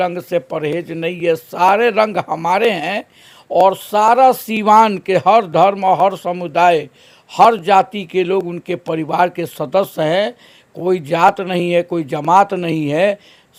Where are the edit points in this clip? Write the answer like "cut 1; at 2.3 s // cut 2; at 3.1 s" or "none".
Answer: none